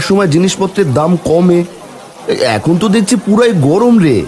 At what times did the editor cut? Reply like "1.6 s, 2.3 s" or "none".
none